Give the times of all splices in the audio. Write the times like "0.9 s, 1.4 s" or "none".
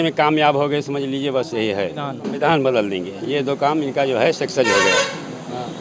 2.2 s